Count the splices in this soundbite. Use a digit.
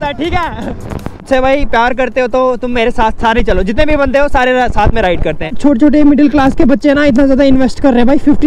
2